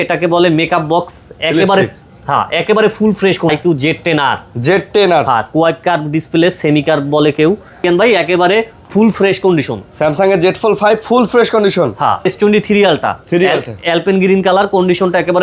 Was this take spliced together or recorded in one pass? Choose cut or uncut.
cut